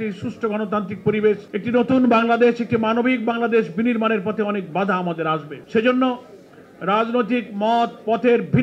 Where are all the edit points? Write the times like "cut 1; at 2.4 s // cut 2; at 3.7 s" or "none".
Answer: cut 1; at 1.5 s // cut 2; at 5.5 s